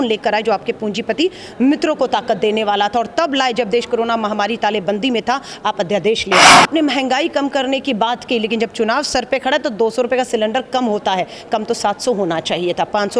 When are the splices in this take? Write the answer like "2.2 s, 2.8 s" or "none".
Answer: 6.5 s